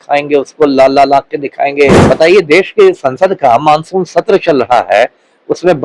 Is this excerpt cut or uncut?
cut